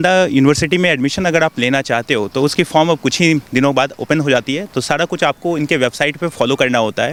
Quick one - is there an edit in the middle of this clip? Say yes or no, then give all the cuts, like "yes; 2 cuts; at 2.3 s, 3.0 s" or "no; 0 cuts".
no; 0 cuts